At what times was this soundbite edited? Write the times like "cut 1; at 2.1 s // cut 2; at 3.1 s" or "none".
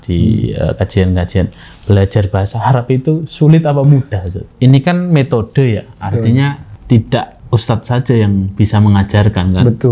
cut 1; at 4.5 s // cut 2; at 6.7 s // cut 3; at 7.4 s